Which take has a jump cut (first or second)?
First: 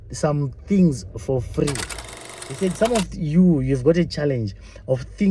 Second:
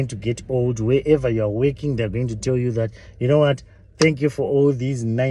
first